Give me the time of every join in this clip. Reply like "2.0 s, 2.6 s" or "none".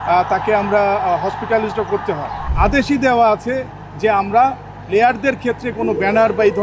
2.4 s